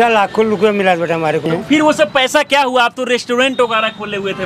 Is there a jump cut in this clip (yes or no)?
yes